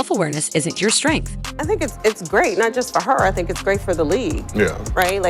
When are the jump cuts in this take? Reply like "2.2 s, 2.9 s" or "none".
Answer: none